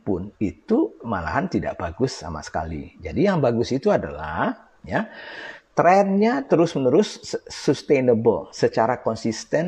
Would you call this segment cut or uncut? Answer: uncut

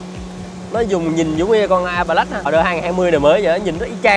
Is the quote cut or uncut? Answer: cut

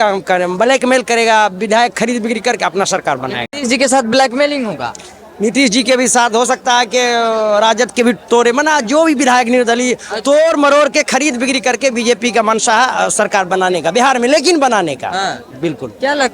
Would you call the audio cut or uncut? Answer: uncut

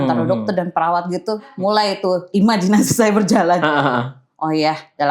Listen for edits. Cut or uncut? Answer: cut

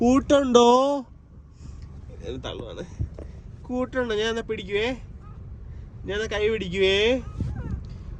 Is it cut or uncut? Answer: uncut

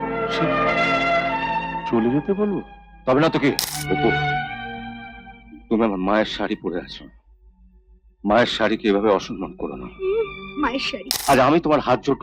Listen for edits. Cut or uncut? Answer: cut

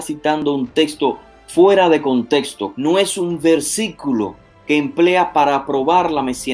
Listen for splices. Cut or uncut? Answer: cut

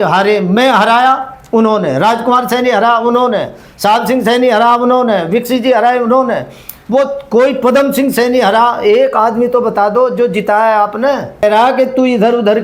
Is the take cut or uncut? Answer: cut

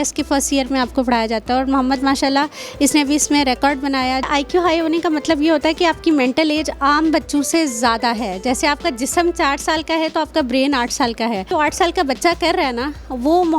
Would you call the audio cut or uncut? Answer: cut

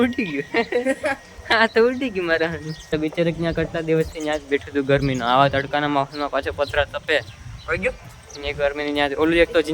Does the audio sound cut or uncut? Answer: cut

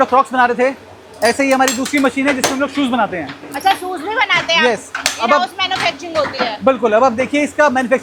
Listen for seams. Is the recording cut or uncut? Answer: uncut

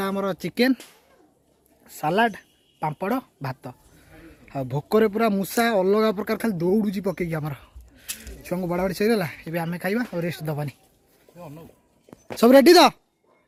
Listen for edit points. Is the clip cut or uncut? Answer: uncut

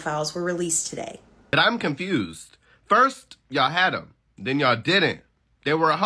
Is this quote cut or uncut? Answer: cut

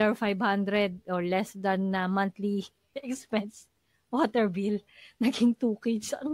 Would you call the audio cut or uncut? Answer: uncut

